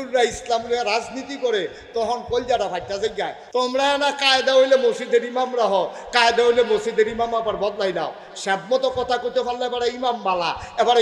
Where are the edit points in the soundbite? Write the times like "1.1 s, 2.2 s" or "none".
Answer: 3.4 s